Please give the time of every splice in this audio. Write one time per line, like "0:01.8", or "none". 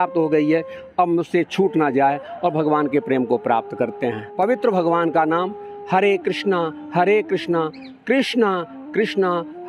0:04.2